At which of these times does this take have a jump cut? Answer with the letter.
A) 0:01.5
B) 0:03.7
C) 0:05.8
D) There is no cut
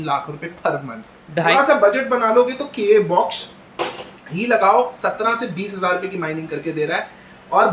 A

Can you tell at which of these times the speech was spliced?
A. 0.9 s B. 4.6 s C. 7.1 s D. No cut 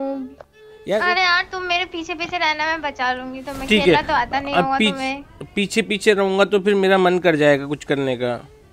A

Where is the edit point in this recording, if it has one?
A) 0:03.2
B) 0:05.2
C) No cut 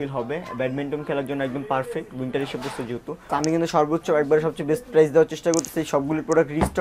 A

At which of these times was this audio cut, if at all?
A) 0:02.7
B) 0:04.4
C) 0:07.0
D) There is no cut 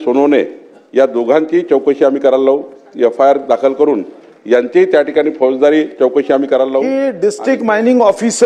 C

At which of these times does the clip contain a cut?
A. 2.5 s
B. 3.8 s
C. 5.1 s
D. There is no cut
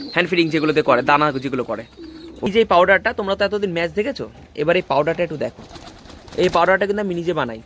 A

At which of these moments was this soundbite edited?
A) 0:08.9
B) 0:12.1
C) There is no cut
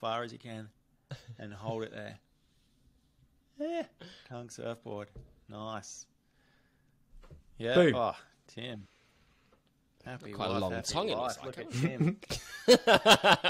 C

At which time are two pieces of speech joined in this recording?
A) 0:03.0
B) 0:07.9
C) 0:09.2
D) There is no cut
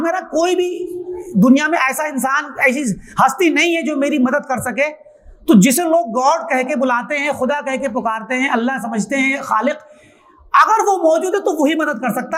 D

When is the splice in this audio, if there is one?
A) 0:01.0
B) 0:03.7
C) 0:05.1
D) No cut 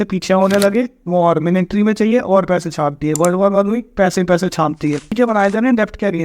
C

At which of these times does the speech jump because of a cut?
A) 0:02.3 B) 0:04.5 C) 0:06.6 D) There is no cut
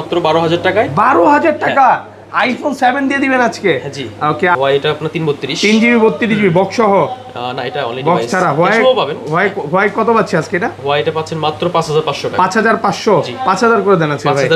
B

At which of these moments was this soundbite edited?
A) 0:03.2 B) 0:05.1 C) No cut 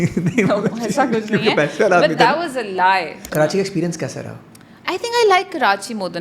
A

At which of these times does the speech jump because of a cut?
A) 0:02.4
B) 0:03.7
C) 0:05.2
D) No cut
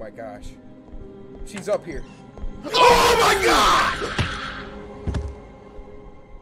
D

